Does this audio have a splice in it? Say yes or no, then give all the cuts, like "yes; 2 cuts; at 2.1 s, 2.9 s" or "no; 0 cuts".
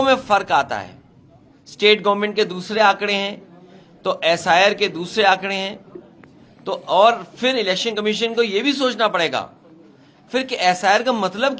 no; 0 cuts